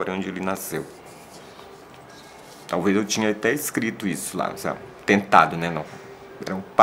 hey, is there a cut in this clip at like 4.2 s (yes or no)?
no